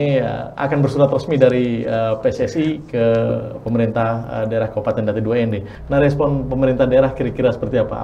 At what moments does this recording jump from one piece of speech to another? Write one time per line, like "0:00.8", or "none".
0:05.7